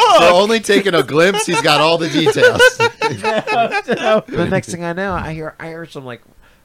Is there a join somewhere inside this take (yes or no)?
yes